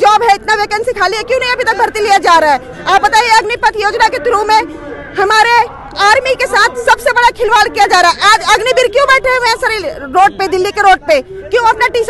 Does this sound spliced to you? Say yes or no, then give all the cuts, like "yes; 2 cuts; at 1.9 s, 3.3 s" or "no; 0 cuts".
no; 0 cuts